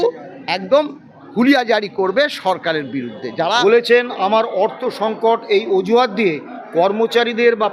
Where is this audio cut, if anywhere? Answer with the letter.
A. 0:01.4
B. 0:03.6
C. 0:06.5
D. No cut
B